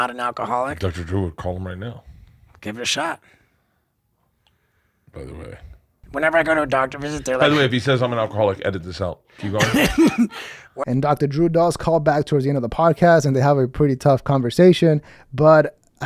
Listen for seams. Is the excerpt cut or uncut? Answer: uncut